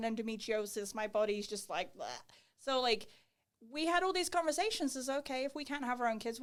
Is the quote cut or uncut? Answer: uncut